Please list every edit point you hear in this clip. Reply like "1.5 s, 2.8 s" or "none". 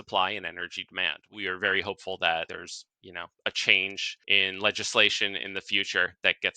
1.2 s, 2.5 s, 4.1 s

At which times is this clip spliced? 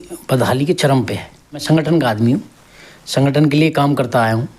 1.6 s

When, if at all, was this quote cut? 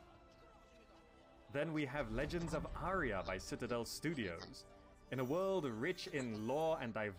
2.7 s

